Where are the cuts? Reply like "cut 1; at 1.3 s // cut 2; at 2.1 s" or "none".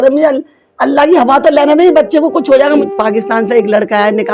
cut 1; at 2.8 s